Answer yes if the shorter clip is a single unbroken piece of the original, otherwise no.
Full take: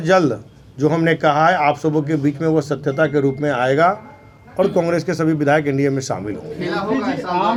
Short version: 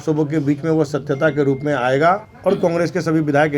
no